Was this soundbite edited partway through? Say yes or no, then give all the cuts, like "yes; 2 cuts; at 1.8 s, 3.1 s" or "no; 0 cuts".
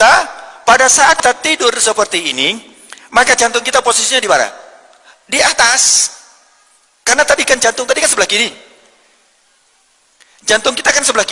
yes; 1 cut; at 1.2 s